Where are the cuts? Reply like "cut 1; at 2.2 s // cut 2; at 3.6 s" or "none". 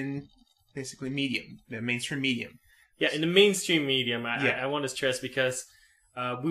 none

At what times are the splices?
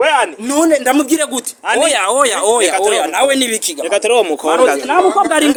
none

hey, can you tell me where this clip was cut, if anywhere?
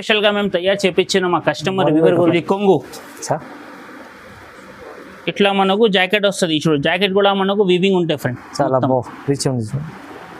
cut 1; at 2.3 s

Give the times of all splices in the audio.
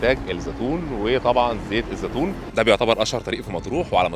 cut 1; at 2.4 s

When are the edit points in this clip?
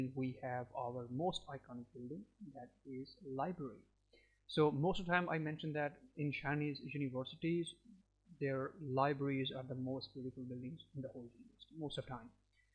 none

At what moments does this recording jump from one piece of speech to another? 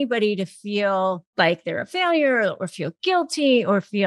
cut 1; at 1.2 s

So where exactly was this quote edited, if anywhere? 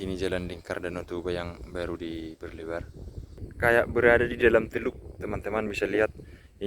cut 1; at 3.4 s

